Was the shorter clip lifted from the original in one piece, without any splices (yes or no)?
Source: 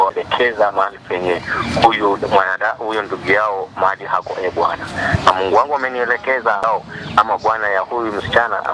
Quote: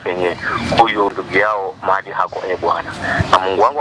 no